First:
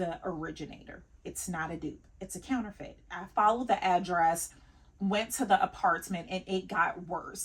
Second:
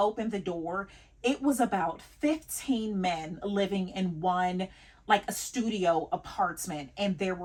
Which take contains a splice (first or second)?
first